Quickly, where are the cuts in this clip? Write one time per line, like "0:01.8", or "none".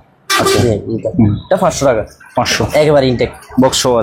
none